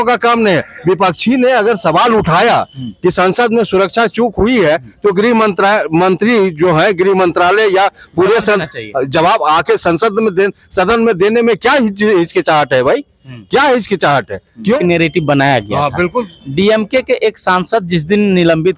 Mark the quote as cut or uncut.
cut